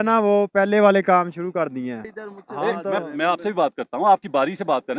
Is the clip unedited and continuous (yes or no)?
no